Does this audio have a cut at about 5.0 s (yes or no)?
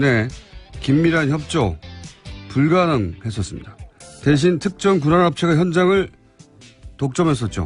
yes